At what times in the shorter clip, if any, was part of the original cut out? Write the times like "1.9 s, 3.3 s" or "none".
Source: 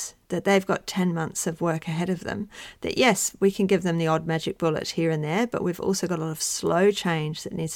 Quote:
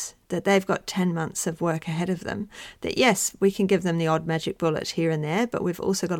none